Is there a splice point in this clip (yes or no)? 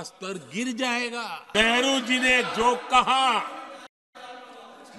yes